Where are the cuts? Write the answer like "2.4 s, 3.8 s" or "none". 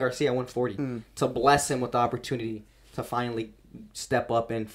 none